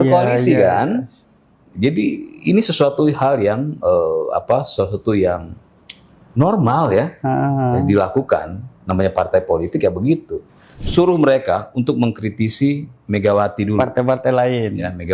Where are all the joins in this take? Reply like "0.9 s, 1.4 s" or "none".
10.8 s